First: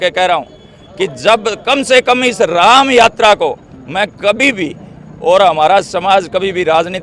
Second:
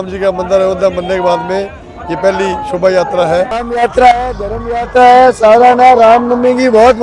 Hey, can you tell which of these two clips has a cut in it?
second; 1 cut; at 3.6 s

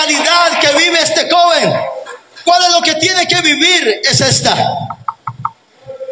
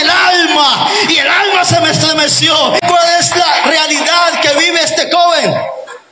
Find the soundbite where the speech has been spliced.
second; 1 cut; at 2.8 s

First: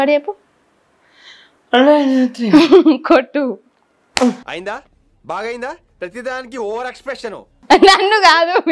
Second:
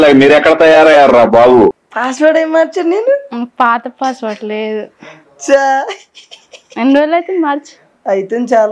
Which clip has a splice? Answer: second; 1 cut; at 1.7 s

